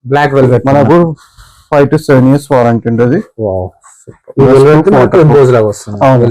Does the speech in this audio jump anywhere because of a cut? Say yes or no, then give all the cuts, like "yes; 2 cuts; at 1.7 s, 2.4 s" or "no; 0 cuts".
no; 0 cuts